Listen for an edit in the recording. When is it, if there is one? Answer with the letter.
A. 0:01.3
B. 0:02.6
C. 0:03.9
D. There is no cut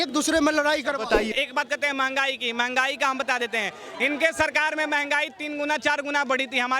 A